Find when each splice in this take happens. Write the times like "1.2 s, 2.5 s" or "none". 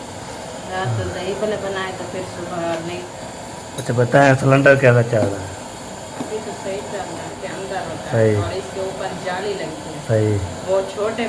3.1 s, 7.4 s

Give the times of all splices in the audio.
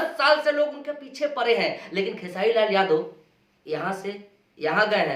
none

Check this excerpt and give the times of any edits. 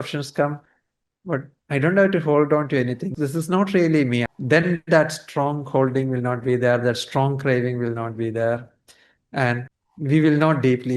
3.1 s, 4.3 s, 9.8 s

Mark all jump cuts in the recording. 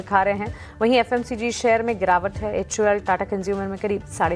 1.5 s

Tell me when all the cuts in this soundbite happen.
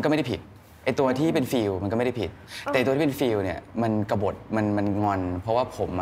none

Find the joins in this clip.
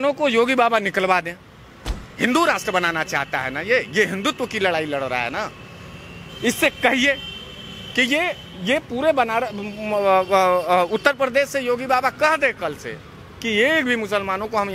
none

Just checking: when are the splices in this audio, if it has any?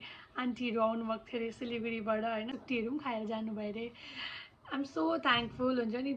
2.5 s

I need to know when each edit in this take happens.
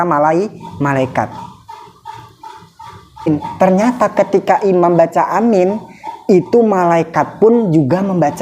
3.3 s

